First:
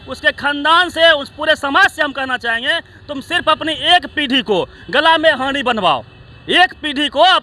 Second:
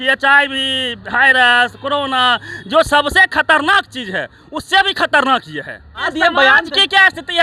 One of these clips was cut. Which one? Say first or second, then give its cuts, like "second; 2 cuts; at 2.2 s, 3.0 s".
second; 1 cut; at 6.1 s